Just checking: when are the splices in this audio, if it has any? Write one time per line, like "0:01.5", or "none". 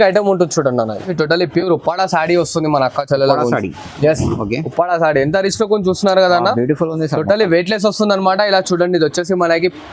0:01.1